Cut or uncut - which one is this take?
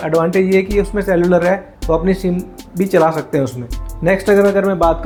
uncut